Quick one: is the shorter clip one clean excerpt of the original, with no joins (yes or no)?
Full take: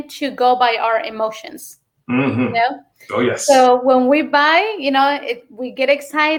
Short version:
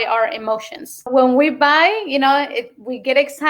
no